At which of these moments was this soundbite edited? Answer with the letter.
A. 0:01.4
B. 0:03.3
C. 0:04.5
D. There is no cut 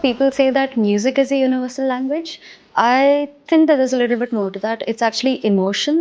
D